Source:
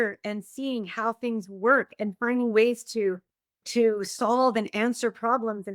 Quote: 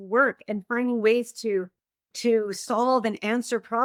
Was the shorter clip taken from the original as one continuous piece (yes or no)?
yes